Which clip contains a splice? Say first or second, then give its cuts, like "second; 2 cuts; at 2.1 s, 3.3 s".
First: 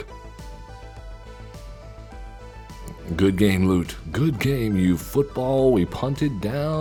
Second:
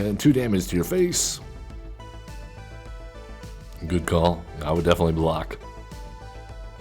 second; 1 cut; at 3.7 s